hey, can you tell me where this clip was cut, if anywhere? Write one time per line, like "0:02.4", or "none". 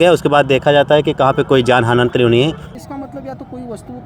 0:02.6